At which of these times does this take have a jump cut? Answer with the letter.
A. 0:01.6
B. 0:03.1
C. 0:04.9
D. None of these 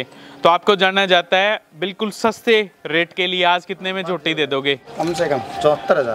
C